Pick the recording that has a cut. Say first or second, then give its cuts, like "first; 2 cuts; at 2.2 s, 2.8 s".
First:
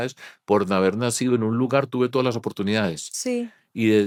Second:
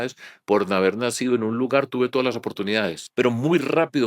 second; 1 cut; at 3.0 s